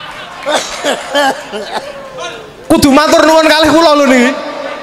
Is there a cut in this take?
no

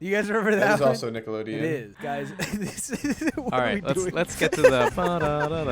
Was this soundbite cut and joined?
yes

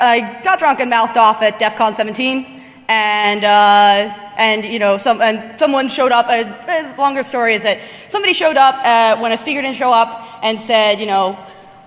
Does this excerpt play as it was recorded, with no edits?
no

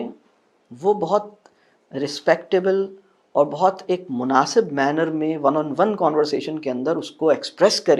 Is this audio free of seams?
yes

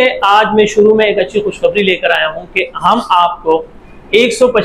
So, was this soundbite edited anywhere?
no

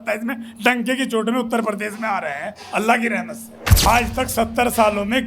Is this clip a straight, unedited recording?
no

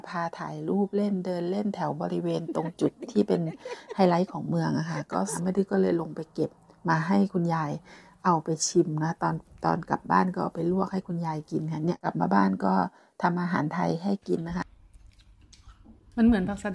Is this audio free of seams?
no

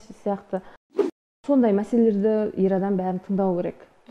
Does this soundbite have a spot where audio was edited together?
yes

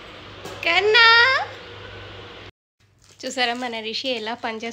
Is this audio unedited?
no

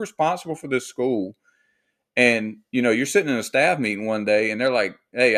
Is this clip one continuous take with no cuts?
yes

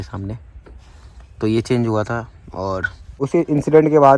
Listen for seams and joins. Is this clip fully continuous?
no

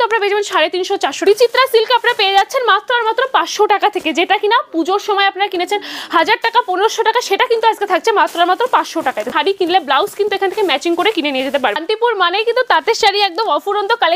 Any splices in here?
yes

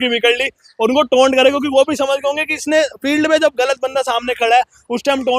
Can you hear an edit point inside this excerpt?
no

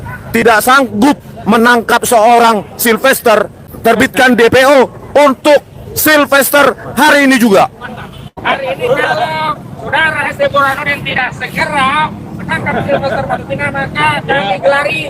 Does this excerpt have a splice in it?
yes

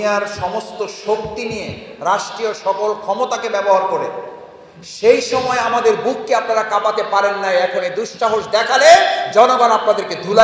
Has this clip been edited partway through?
no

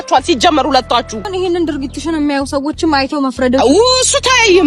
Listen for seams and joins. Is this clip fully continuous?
no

